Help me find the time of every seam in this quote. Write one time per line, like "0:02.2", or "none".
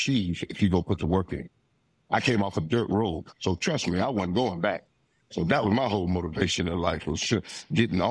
0:03.3